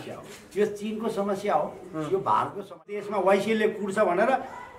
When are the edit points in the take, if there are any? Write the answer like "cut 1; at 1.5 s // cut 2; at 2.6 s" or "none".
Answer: cut 1; at 3.1 s